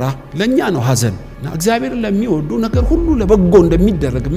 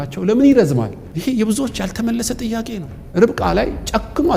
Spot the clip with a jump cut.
second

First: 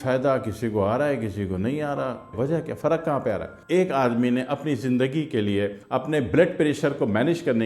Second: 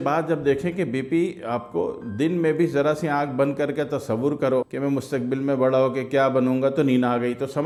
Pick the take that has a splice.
first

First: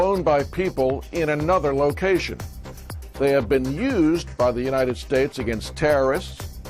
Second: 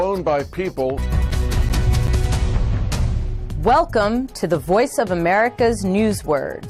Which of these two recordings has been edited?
first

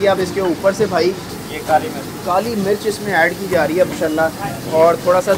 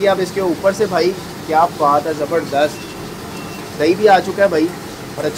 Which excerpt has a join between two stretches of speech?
first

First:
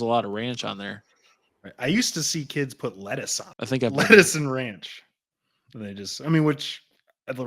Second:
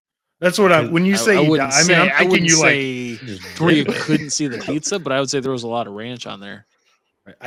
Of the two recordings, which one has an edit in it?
first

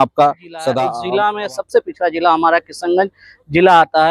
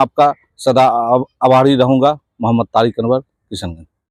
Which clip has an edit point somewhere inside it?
first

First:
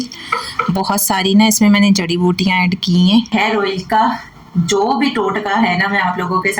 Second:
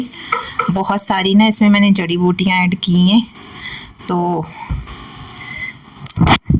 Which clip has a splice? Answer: first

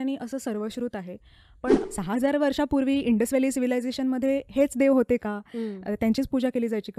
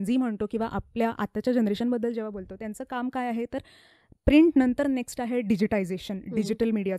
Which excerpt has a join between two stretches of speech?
first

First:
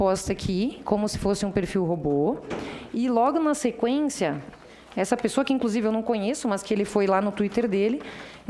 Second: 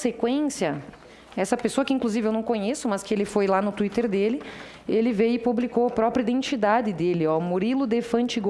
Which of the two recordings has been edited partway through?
first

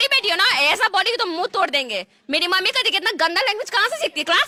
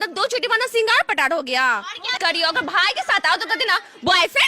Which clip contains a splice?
second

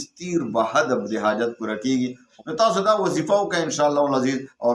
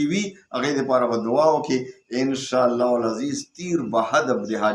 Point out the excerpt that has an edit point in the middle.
first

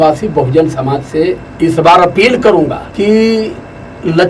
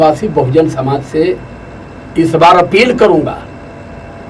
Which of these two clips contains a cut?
first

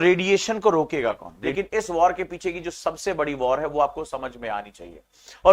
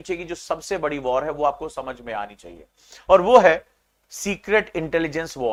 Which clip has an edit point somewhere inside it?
first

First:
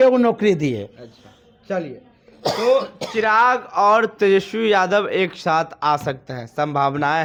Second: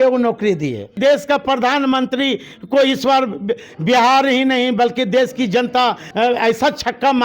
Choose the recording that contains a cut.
second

